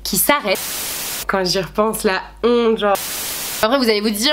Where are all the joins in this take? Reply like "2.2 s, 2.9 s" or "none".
1.1 s, 3.4 s